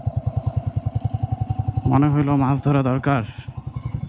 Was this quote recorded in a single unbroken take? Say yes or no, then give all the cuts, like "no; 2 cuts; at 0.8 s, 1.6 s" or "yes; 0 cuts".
yes; 0 cuts